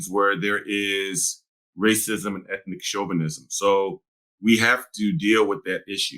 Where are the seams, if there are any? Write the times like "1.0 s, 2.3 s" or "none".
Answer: none